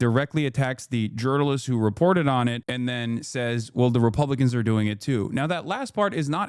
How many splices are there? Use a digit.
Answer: 1